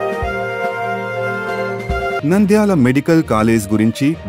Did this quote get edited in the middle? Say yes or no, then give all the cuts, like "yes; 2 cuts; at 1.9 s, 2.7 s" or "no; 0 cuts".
yes; 2 cuts; at 0.8 s, 2.2 s